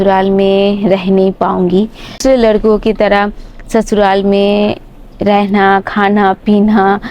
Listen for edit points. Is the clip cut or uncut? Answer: cut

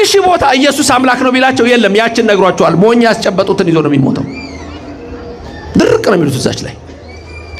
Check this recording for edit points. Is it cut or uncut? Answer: uncut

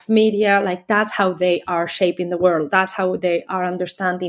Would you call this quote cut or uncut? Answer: uncut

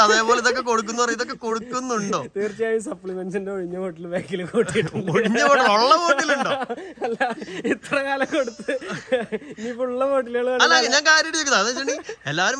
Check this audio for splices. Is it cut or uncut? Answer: uncut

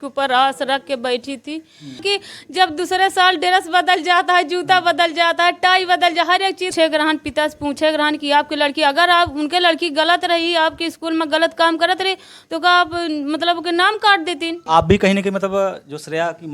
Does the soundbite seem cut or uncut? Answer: cut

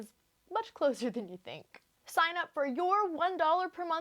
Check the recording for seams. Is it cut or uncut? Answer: cut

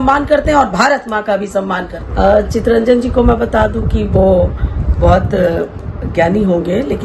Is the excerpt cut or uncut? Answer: cut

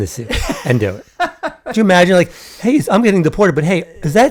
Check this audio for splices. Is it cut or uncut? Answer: uncut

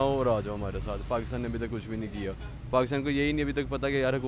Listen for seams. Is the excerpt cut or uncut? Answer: uncut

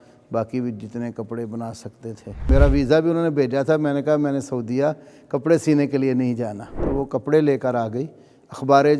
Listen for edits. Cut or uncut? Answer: cut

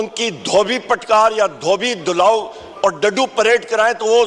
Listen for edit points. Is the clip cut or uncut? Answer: uncut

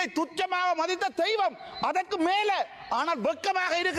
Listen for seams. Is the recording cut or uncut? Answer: uncut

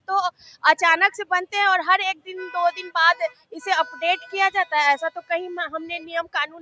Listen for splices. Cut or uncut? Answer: uncut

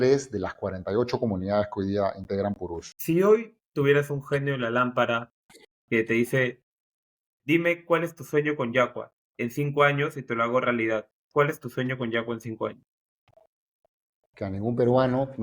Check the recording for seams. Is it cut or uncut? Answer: cut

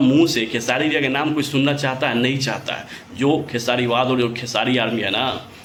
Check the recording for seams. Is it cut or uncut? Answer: uncut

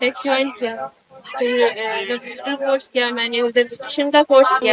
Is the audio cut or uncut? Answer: uncut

